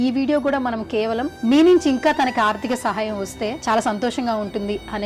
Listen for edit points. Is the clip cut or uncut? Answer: cut